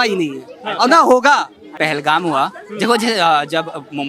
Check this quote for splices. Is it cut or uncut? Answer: cut